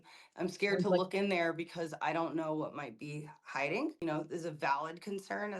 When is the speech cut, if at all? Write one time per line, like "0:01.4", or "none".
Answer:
0:04.0